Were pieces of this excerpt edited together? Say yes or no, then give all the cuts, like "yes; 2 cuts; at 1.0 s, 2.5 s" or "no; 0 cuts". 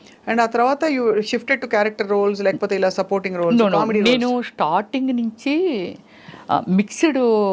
no; 0 cuts